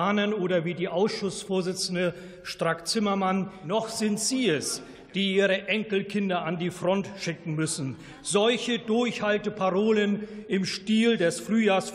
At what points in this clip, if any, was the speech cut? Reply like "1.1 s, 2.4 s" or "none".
3.6 s